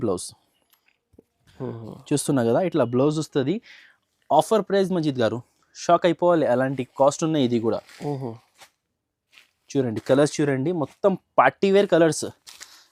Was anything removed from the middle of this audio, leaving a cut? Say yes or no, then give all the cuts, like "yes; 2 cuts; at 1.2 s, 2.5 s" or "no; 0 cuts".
no; 0 cuts